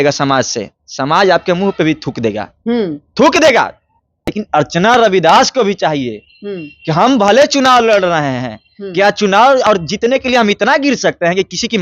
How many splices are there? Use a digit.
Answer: 1